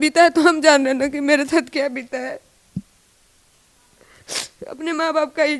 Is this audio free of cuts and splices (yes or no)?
yes